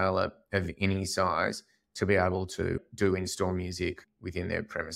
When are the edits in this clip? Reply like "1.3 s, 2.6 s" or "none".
2.8 s, 4.1 s

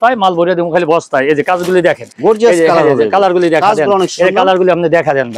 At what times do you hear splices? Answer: none

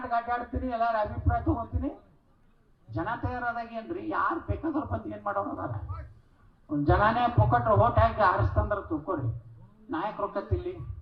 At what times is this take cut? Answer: none

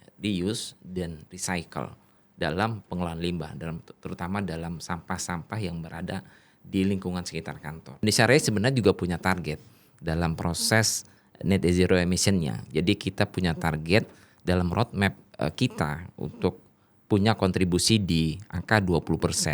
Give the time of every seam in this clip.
8.0 s

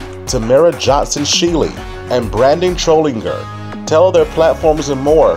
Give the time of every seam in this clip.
none

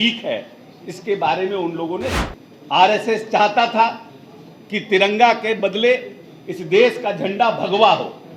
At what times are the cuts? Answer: 2.2 s

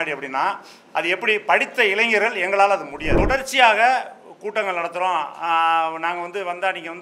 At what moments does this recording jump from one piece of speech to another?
3.1 s

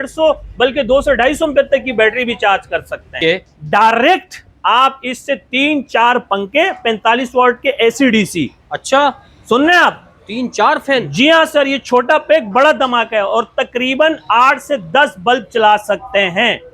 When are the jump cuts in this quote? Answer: 3.1 s

